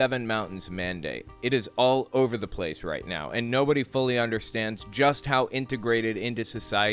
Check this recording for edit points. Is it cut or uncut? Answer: uncut